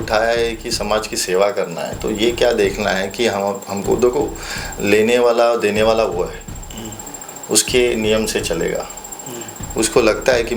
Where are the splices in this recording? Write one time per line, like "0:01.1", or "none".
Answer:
none